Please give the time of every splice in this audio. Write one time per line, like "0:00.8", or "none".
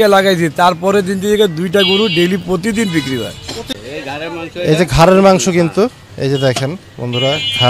0:03.7